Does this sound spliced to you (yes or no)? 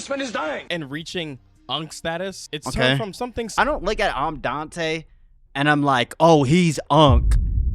yes